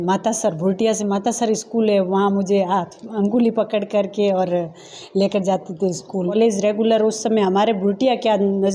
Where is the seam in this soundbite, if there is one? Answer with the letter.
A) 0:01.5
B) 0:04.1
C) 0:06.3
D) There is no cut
C